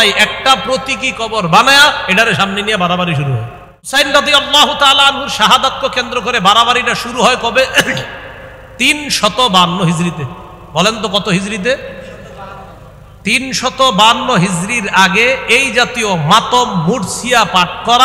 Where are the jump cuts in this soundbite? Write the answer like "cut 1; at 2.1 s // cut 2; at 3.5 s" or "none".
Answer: cut 1; at 3.9 s